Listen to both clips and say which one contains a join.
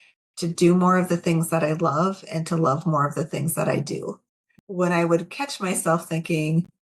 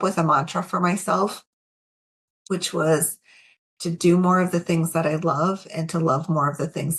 first; 1 cut; at 4.6 s

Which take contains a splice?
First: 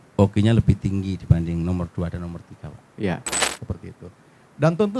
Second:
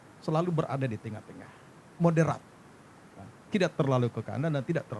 first; 1 cut; at 3.4 s

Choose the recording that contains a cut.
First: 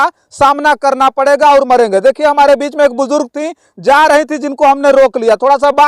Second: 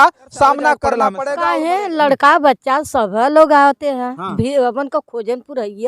second; 1 cut; at 1.2 s

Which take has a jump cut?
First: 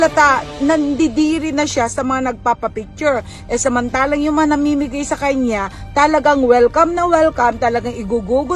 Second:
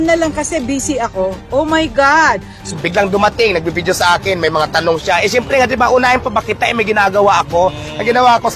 second; 1 cut; at 2.8 s

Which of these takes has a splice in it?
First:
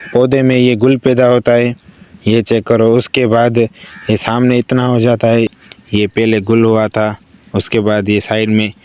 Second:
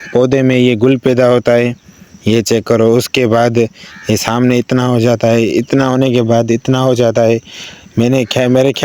first; 1 cut; at 5.5 s

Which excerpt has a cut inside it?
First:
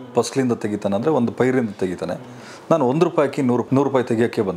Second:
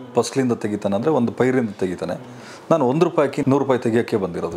second; 1 cut; at 3.4 s

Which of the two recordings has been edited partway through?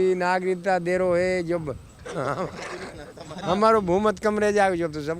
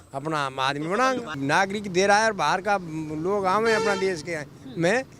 second; 1 cut; at 1.3 s

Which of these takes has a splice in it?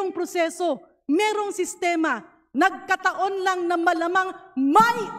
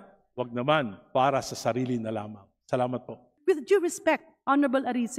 second; 1 cut; at 3.3 s

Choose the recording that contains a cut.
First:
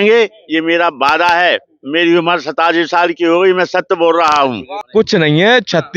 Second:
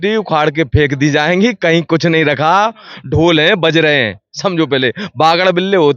first; 1 cut; at 4.7 s

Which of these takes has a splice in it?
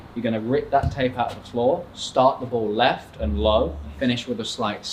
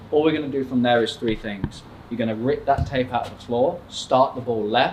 first; 1 cut; at 3.9 s

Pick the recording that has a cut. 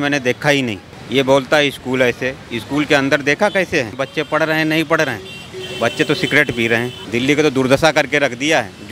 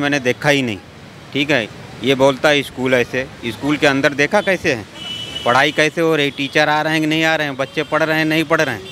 first; 3 cuts; at 0.9 s, 4.0 s, 7.0 s

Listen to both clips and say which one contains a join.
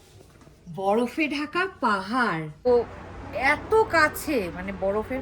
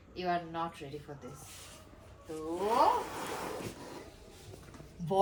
first; 1 cut; at 2.7 s

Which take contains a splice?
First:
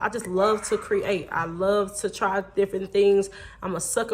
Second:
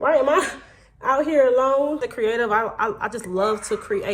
second; 1 cut; at 2.1 s

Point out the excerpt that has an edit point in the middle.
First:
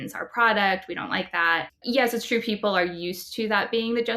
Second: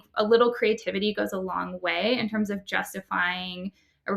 first; 1 cut; at 1.8 s

